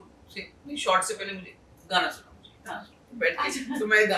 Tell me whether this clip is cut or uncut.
uncut